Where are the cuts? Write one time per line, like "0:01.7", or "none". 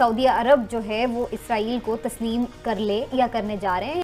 none